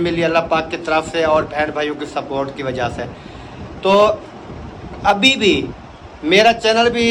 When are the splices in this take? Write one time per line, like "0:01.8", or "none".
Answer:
none